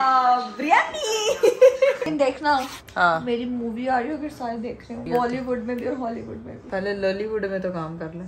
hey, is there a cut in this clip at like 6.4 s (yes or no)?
no